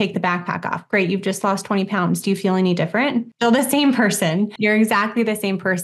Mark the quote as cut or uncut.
cut